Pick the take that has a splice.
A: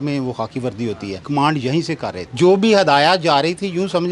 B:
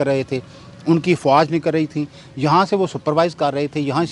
A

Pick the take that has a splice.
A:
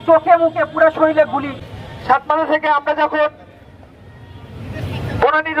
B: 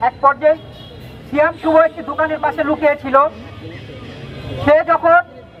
A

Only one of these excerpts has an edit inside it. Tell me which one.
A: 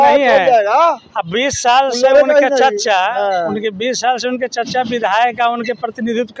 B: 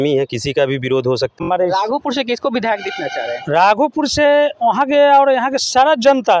B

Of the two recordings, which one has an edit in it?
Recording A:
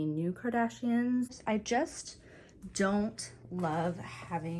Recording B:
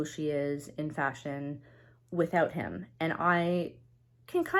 A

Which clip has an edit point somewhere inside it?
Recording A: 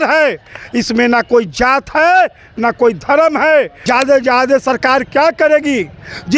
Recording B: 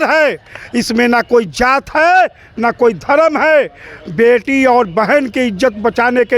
A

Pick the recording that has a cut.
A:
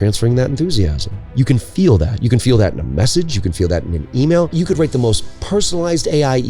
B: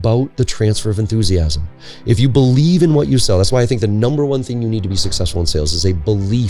A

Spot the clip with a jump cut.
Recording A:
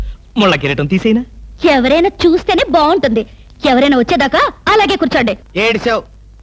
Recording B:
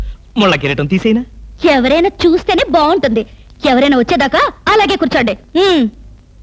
A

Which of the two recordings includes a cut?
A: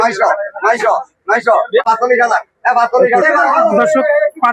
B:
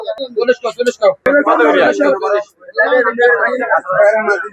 A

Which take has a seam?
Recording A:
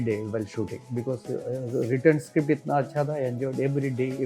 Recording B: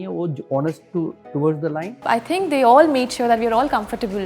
B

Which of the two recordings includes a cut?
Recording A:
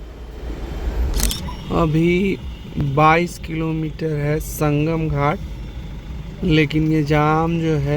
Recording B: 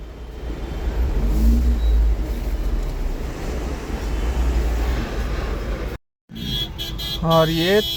A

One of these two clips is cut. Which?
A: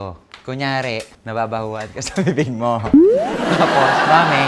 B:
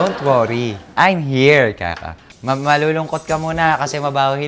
B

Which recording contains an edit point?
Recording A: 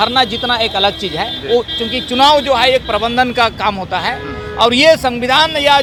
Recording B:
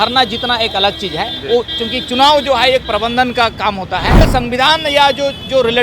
B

